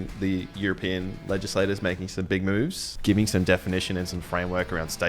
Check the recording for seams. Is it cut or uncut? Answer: cut